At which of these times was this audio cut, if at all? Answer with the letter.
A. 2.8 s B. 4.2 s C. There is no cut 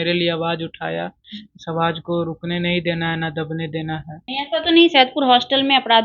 B